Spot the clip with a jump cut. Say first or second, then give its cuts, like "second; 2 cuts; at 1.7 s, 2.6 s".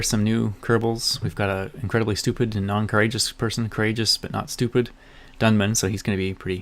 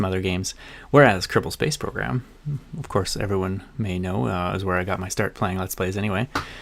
first; 1 cut; at 3.7 s